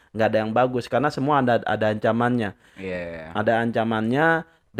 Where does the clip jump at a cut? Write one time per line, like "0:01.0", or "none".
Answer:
none